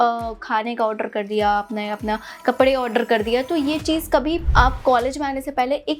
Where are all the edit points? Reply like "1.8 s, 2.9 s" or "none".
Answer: 4.4 s